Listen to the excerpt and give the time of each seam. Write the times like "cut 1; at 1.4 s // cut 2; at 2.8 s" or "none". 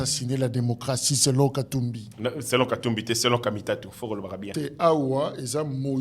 none